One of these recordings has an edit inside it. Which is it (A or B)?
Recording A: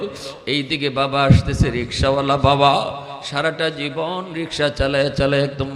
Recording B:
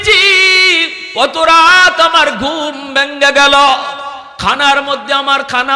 B